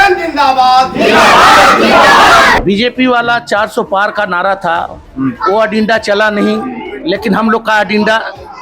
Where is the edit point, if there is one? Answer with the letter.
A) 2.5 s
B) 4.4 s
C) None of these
A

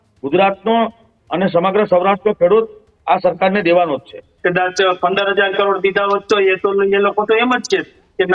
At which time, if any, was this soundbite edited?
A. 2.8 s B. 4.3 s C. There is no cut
B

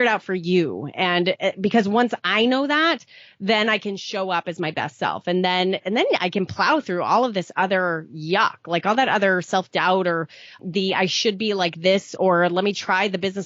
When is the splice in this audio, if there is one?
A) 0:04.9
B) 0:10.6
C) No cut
B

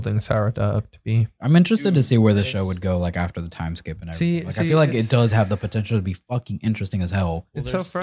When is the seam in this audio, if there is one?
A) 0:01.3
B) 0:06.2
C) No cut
A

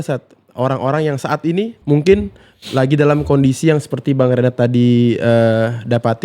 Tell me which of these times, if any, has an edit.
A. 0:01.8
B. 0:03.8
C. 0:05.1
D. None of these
A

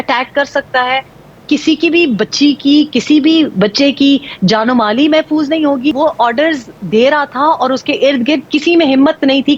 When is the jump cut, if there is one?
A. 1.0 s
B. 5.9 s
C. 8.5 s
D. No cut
B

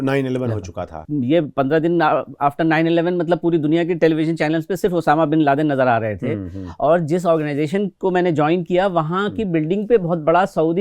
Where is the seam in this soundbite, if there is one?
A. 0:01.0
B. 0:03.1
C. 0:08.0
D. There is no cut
A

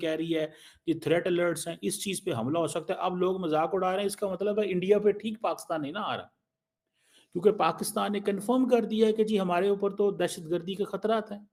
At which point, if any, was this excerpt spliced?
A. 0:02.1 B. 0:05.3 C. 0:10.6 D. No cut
D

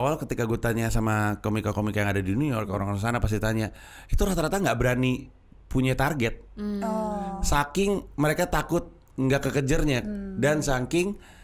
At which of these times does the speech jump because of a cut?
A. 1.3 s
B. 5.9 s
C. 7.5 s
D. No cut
D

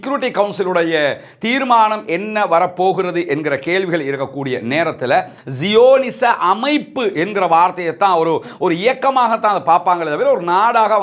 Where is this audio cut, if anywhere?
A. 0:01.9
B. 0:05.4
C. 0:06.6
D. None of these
B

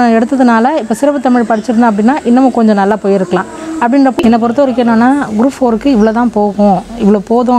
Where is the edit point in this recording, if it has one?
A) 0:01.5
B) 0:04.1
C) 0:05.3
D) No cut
B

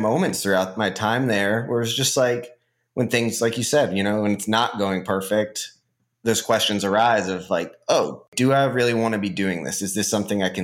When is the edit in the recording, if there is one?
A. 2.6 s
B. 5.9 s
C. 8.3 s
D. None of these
C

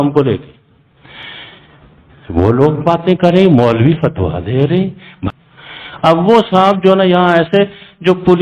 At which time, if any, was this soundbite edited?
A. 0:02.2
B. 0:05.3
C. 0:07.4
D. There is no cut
B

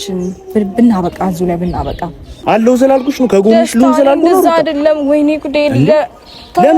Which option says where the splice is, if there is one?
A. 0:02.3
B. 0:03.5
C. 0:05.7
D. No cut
A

